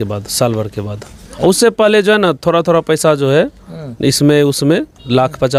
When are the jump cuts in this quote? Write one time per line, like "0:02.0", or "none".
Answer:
none